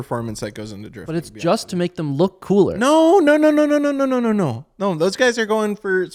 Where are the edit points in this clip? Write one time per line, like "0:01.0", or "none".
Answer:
none